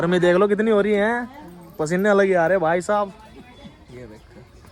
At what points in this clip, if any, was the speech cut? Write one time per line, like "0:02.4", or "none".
none